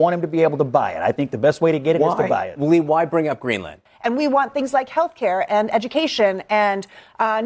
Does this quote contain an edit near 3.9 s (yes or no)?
yes